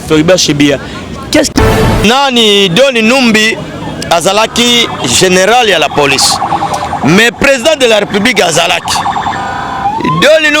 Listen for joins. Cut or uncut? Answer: cut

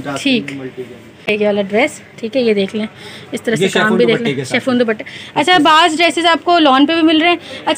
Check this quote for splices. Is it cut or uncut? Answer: cut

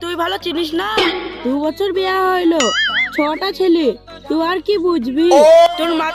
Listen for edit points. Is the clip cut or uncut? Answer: uncut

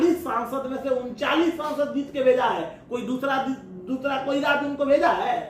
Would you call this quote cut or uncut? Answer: uncut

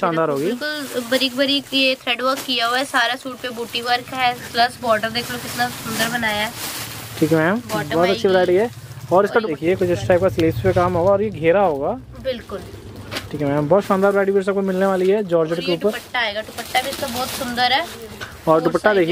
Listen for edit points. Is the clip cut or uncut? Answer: cut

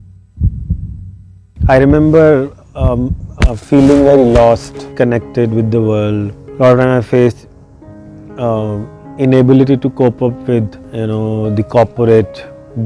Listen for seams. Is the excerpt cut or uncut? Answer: cut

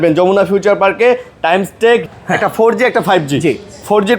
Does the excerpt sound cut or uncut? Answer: cut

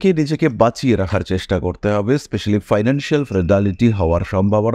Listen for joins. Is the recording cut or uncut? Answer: uncut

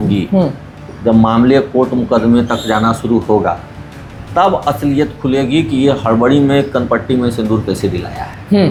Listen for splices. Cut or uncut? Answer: uncut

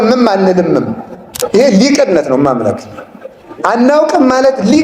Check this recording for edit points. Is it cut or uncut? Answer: cut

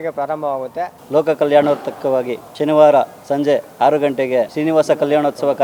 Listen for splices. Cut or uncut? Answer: cut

